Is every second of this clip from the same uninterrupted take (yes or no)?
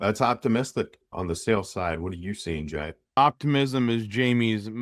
no